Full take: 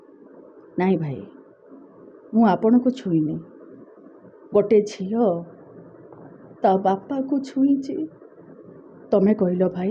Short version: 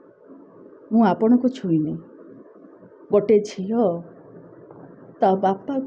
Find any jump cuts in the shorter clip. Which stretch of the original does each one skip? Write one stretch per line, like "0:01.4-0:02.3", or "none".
none